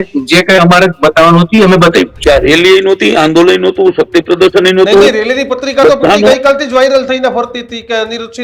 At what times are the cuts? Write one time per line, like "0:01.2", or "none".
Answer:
0:02.1

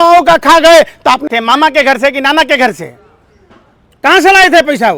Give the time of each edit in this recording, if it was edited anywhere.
0:01.2

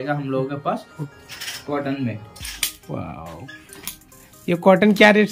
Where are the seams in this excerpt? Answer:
0:01.1

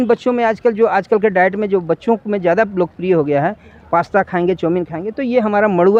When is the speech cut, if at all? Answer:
none

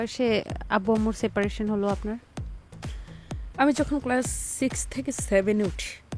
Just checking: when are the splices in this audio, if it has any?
none

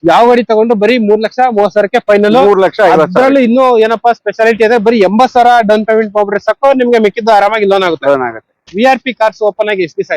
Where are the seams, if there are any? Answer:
0:08.6

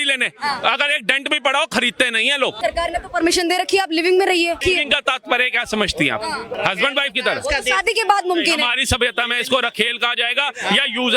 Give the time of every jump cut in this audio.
0:02.6
0:04.6
0:06.5

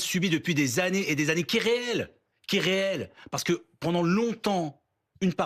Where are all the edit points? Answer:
none

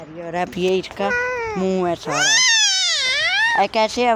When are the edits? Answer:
none

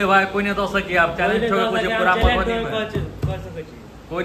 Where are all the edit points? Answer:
none

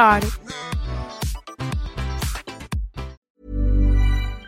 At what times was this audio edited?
0:03.2

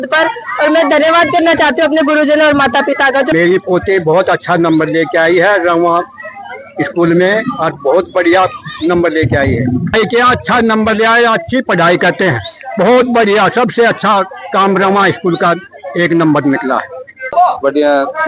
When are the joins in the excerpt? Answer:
0:03.3
0:09.9
0:17.3

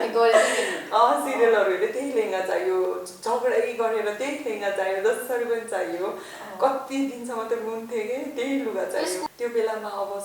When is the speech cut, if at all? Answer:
0:09.3

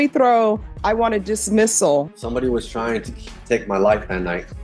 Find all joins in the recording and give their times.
0:02.1

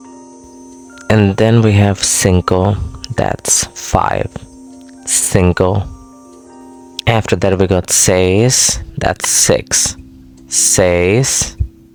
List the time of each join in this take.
none

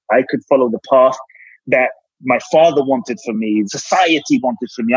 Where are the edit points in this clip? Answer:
0:03.7

